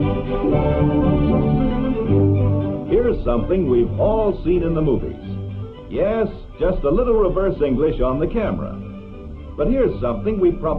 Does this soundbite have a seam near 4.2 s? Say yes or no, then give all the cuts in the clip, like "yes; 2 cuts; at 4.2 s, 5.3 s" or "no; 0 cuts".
yes; 1 cut; at 4.2 s